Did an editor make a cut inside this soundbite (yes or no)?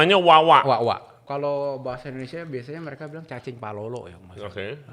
yes